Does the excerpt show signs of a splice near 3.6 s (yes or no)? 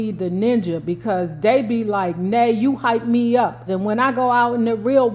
yes